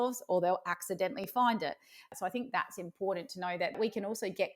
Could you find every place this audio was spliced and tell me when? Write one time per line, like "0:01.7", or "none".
0:02.1
0:03.8